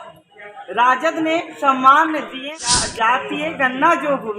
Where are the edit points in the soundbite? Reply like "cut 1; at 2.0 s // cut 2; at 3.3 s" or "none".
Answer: cut 1; at 2.5 s